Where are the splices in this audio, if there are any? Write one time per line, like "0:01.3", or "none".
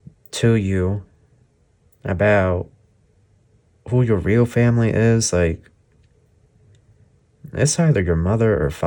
none